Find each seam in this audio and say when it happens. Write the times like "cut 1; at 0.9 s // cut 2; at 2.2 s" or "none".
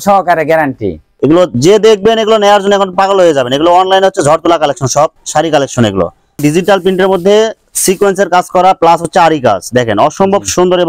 cut 1; at 1.0 s // cut 2; at 6.3 s